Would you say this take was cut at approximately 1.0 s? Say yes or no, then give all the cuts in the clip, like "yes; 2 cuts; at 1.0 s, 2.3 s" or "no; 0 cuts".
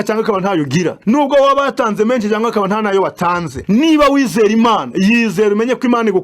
yes; 2 cuts; at 1.0 s, 3.5 s